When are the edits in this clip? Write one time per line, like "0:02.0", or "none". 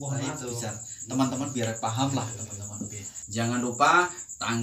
0:03.1